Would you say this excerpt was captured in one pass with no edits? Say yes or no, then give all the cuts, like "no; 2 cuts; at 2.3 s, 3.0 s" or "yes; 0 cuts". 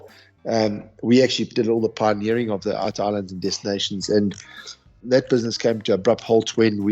no; 2 cuts; at 2.8 s, 4.9 s